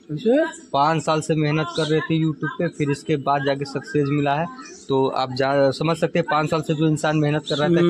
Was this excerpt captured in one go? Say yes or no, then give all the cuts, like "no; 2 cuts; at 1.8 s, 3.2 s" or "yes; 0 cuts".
yes; 0 cuts